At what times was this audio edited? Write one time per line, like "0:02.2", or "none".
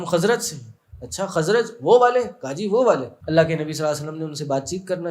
0:03.1